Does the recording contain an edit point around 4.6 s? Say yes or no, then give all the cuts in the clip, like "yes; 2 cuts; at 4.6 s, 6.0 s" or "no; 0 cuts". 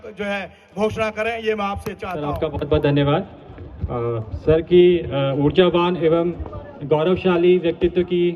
no; 1 cut; at 2.3 s